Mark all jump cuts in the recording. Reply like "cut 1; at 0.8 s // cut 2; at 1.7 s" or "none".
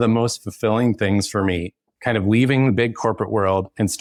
none

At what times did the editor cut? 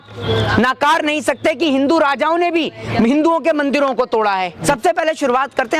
cut 1; at 4.6 s

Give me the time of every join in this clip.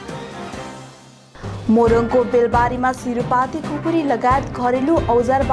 none

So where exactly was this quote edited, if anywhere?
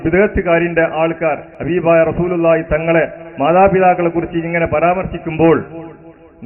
cut 1; at 1.5 s

